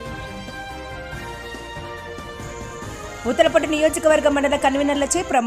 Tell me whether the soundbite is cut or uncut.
uncut